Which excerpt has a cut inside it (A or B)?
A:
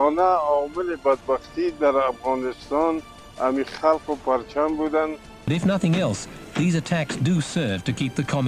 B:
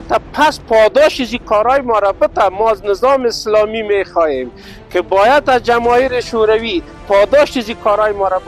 A